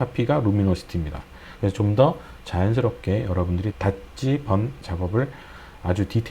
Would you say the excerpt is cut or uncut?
cut